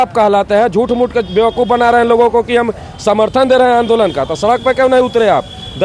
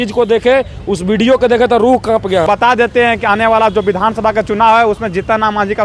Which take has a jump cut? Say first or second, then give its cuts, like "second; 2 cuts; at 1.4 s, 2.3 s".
second; 1 cut; at 2.4 s